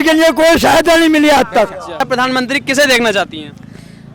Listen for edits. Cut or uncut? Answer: cut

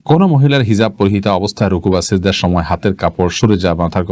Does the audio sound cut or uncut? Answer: uncut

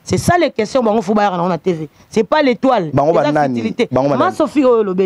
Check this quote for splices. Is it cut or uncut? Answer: uncut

